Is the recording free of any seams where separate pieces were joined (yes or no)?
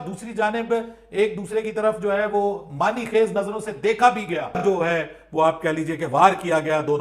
no